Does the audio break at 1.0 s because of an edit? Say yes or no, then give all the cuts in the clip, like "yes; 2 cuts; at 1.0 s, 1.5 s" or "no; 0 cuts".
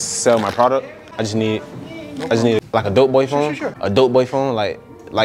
yes; 3 cuts; at 1.0 s, 2.6 s, 3.7 s